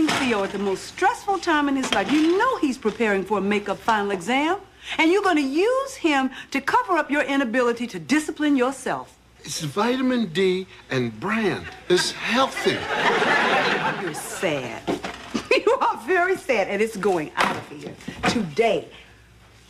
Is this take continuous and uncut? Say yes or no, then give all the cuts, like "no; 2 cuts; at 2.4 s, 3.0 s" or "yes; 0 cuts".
no; 1 cut; at 12.7 s